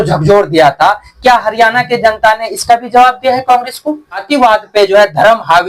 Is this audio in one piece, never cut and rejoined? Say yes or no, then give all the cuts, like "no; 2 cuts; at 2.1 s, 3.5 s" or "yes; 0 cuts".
no; 1 cut; at 4.2 s